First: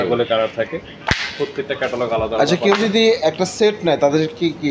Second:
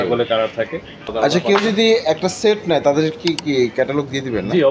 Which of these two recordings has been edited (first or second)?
second